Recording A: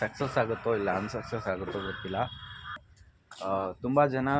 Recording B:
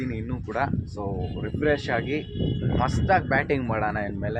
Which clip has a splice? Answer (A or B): A